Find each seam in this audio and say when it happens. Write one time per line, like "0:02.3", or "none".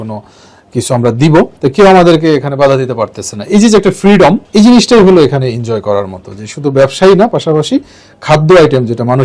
0:01.5
0:04.4